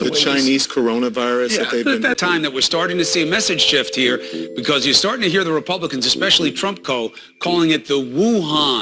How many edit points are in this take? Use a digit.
1